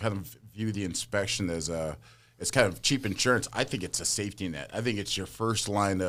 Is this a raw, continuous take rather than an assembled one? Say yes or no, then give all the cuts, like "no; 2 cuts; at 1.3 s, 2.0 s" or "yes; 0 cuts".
yes; 0 cuts